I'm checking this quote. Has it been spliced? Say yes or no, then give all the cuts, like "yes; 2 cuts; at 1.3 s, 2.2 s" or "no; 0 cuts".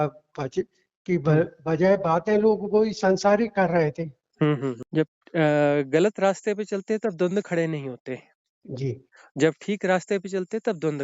yes; 1 cut; at 4.8 s